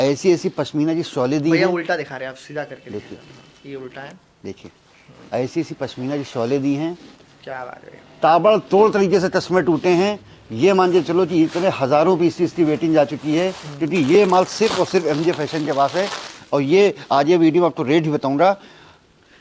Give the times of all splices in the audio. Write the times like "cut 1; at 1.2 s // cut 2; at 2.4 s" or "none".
none